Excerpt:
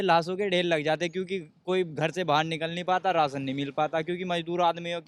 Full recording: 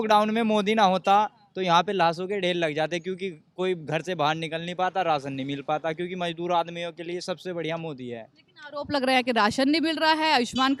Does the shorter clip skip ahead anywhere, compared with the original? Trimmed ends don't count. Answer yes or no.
no